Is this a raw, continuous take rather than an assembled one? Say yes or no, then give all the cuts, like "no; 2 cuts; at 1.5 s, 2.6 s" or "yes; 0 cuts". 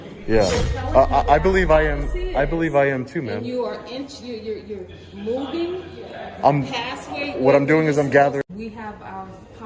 no; 1 cut; at 8.4 s